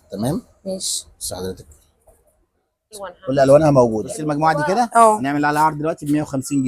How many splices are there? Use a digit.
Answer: 2